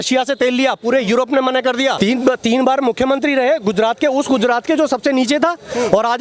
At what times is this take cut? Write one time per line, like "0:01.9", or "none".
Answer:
0:02.0

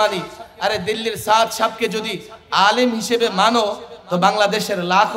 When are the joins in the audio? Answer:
none

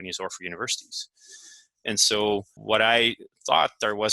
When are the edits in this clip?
0:02.5

